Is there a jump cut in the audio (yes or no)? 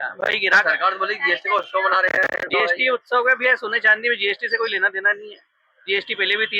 no